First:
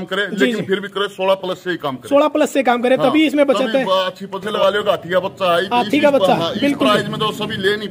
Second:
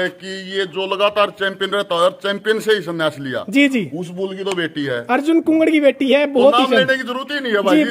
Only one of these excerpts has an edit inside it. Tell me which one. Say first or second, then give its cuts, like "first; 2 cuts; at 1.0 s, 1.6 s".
first; 1 cut; at 4.5 s